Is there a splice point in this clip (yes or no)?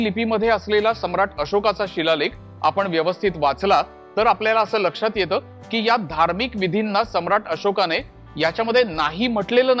no